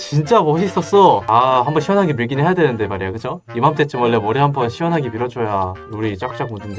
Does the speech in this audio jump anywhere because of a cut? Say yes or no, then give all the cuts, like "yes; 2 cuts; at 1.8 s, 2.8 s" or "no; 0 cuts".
no; 0 cuts